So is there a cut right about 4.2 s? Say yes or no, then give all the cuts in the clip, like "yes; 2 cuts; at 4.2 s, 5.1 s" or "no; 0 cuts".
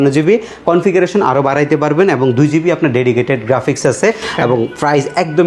no; 0 cuts